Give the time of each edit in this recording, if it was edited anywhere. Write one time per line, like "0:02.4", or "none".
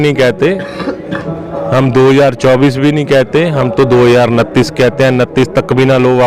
none